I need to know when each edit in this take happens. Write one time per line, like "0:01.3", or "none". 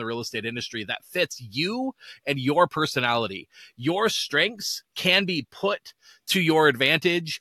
none